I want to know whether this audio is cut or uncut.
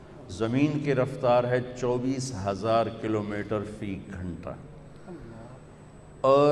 uncut